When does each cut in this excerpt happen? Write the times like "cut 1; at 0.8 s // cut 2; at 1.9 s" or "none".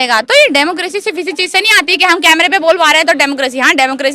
none